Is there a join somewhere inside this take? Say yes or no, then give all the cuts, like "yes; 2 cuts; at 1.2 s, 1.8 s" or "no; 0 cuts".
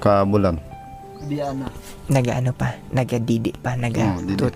no; 0 cuts